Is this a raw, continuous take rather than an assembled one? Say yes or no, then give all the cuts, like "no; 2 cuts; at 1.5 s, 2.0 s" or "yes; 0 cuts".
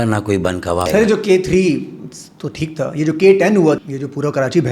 no; 2 cuts; at 0.9 s, 3.8 s